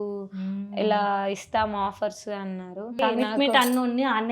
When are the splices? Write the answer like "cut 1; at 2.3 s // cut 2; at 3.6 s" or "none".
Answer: cut 1; at 3.0 s